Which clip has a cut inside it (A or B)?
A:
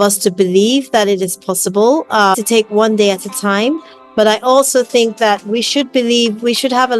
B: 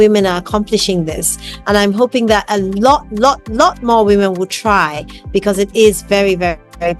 A